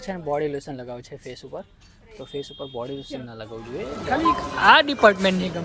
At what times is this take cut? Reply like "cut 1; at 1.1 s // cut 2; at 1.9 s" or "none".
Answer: cut 1; at 4.0 s

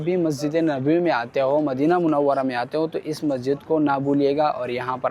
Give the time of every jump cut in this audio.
none

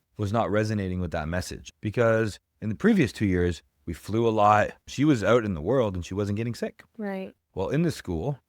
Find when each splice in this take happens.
cut 1; at 1.6 s // cut 2; at 4.9 s

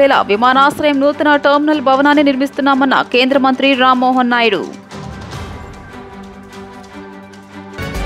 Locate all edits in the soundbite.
none

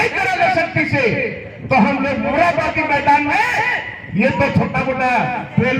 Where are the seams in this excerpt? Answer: none

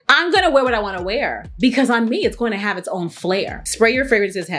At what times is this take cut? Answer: cut 1; at 3.5 s

